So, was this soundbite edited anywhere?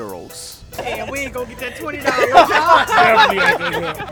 no; 0 cuts

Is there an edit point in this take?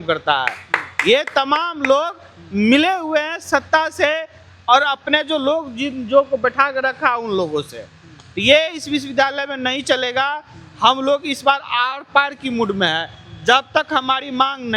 no; 0 cuts

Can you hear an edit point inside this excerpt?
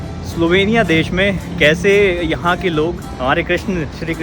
yes; 1 cut; at 3.1 s

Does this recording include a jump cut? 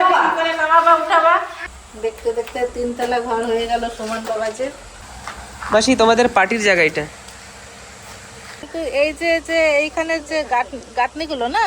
yes; 2 cuts; at 1.6 s, 8.6 s

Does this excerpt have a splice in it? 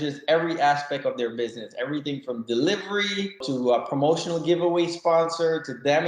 yes; 1 cut; at 3.4 s

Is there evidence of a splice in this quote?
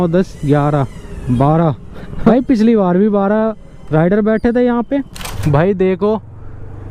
yes; 2 cuts; at 2.3 s, 5.4 s

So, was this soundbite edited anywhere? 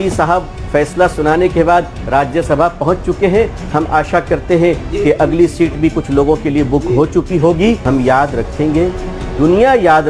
yes; 1 cut; at 7.8 s

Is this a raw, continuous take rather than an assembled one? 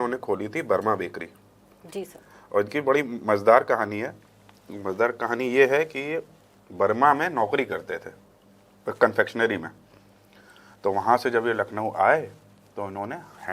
yes; 0 cuts

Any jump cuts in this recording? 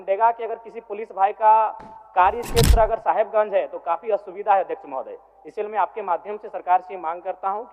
no; 0 cuts

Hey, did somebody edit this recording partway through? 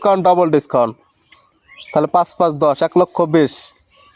no; 0 cuts

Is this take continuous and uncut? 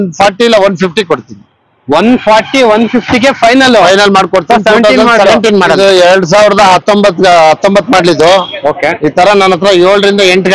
no; 1 cut; at 5.7 s

